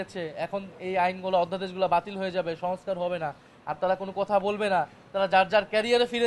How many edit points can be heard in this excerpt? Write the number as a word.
zero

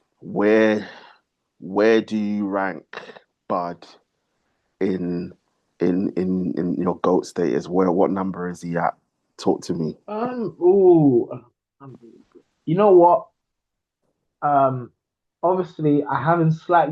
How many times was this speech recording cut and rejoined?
zero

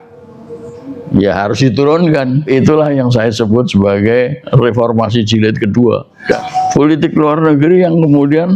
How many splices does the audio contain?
one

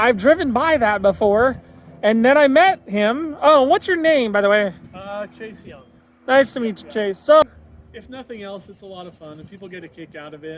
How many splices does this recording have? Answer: one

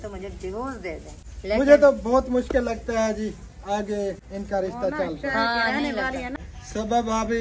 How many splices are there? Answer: two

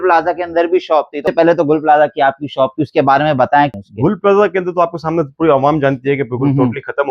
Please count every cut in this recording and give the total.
two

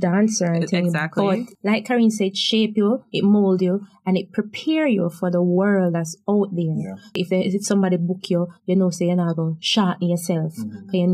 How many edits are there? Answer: two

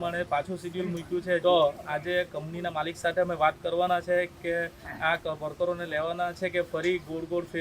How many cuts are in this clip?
one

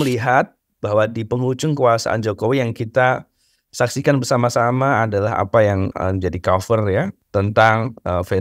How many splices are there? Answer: two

